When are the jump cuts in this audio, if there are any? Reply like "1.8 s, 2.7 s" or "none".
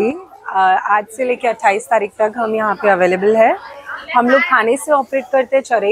none